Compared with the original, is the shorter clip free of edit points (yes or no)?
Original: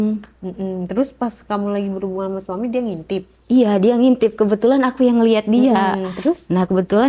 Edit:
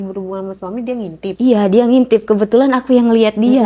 no